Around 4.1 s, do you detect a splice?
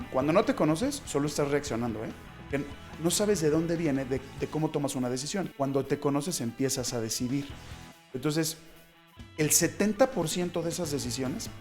no; 1 cut; at 5.5 s

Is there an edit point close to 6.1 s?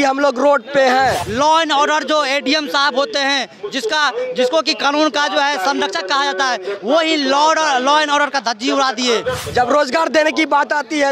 no; 2 cuts; at 1.3 s, 9.4 s

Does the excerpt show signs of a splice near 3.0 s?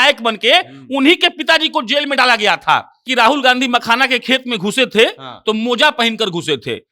yes; 1 cut; at 3.0 s

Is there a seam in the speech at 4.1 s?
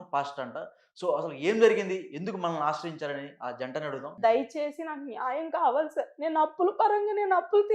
yes; 1 cut; at 4.1 s

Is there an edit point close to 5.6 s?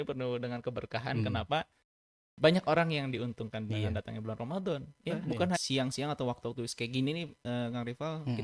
yes; 1 cut; at 5.6 s

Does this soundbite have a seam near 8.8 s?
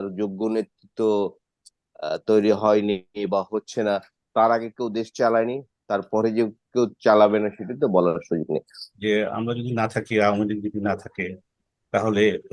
yes; 1 cut; at 8.8 s

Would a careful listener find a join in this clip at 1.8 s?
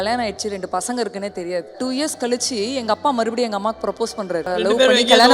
yes; 2 cuts; at 1.8 s, 4.5 s

